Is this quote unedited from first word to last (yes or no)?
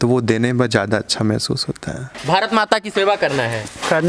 no